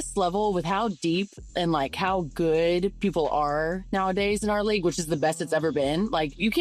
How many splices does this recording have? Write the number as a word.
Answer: one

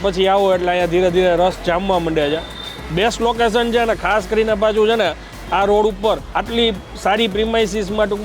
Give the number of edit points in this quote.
zero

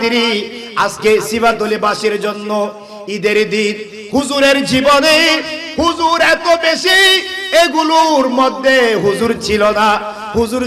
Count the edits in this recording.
one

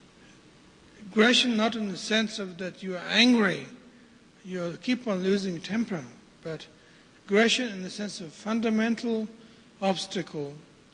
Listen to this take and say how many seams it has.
one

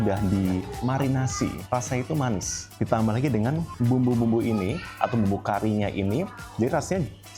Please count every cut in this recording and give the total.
two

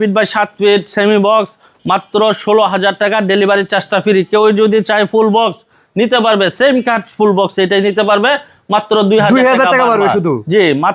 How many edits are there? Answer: zero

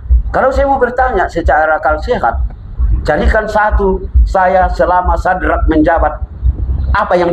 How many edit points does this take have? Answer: zero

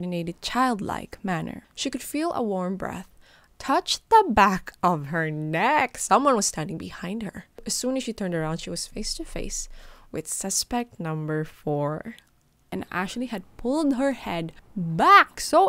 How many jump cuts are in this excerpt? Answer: three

